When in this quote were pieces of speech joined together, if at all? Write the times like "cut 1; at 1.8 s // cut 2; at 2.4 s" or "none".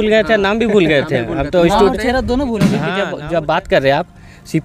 cut 1; at 3.0 s